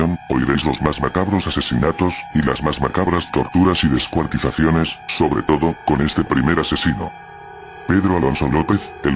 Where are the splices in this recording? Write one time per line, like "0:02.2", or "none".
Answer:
0:00.9